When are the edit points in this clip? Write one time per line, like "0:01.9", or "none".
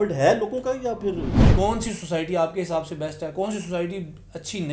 0:01.4